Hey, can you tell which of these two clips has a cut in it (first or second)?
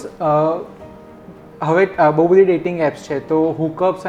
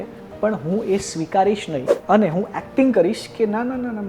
second